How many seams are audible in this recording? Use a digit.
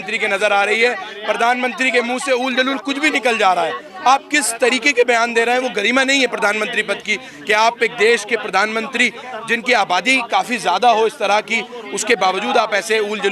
0